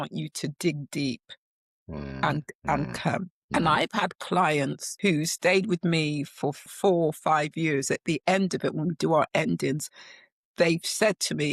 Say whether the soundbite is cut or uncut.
cut